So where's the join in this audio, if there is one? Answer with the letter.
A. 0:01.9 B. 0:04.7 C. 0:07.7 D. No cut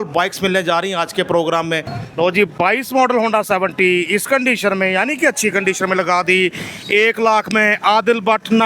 A